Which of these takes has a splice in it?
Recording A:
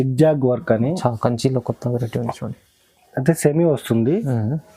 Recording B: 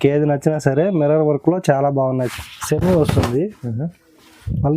B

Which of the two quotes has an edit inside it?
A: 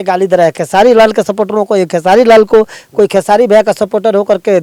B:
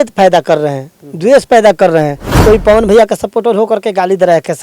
B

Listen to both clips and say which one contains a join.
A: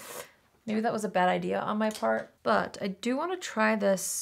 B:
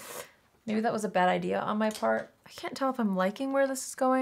B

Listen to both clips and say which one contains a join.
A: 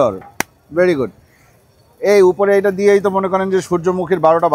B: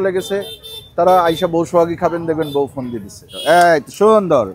B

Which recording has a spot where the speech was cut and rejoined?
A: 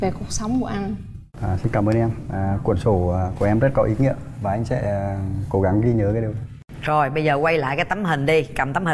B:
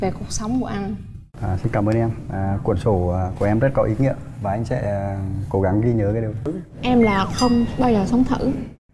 B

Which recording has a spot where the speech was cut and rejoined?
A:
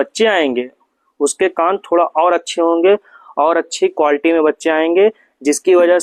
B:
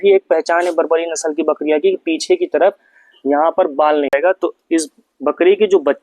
B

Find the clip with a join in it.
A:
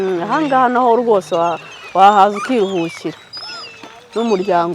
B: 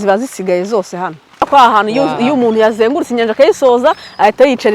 B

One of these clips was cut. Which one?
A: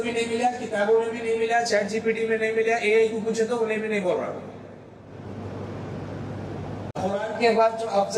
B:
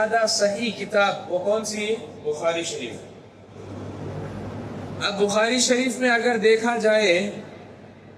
A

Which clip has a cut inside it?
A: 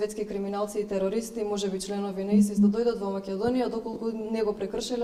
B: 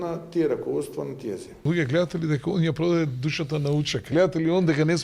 B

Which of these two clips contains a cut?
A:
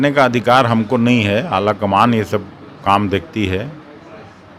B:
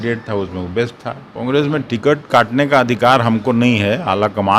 B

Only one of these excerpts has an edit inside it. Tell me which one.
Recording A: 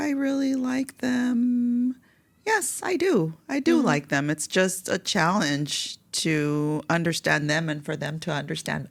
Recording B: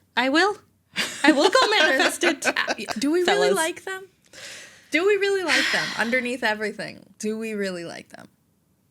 B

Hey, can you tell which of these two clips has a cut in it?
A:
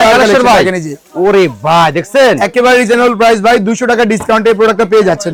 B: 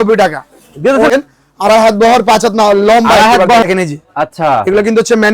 B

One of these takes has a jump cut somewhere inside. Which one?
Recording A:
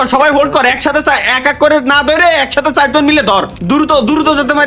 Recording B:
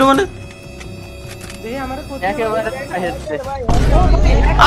A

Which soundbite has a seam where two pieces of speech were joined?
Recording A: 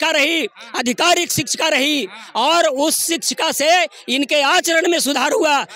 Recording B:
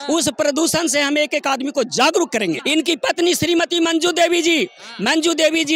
B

